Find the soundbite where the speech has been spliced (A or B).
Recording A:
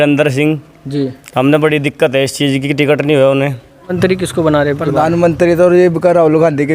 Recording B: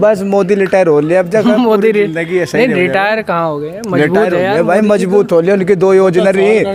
A